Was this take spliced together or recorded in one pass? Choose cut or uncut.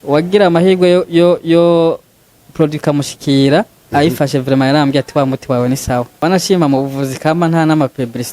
cut